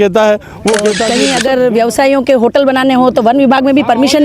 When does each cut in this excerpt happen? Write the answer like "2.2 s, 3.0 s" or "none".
1.1 s